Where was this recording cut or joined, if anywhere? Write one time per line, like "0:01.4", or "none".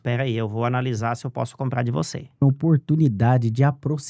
0:02.4